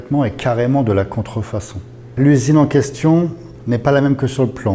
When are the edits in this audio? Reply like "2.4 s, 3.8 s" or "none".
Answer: 2.0 s